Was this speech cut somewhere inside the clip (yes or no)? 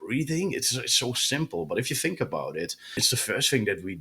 yes